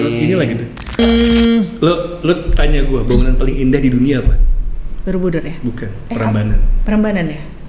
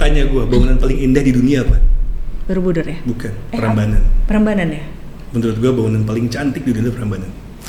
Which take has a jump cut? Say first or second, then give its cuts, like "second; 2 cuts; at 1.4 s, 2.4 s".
first; 1 cut; at 1.0 s